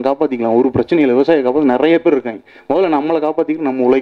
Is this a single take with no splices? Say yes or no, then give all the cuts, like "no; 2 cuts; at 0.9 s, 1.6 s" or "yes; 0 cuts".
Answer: yes; 0 cuts